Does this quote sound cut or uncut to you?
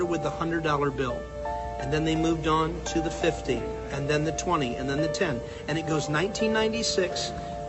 uncut